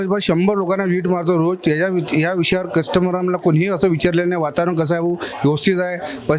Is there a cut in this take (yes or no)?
no